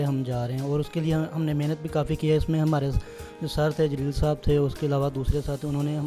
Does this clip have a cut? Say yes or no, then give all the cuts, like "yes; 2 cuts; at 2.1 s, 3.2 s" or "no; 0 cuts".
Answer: no; 0 cuts